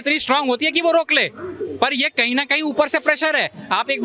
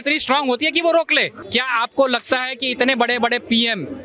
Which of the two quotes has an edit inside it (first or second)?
second